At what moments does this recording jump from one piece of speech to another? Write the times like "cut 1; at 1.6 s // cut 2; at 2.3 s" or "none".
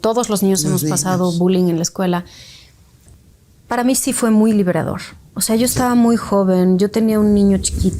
cut 1; at 3.1 s